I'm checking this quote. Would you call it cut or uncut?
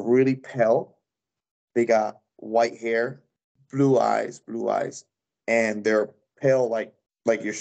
uncut